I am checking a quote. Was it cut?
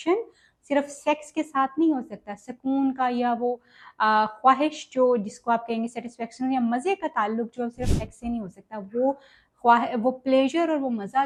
no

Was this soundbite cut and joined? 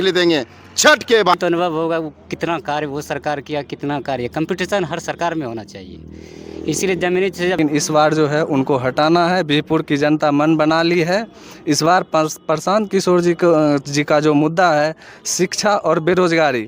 yes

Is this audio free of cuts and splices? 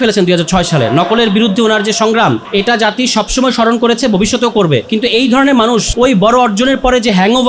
no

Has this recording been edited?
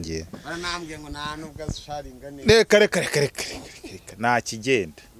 no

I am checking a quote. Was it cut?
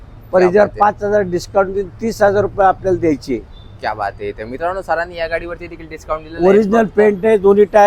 no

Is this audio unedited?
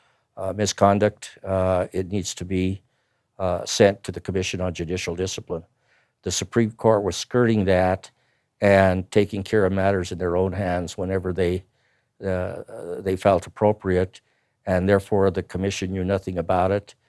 yes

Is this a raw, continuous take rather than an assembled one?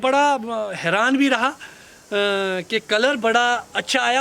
yes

